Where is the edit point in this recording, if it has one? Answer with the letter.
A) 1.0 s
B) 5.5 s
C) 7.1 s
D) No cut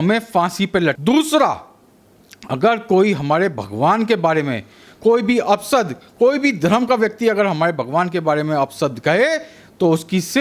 A